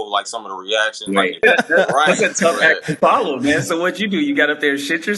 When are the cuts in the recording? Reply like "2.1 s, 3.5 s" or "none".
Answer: 1.4 s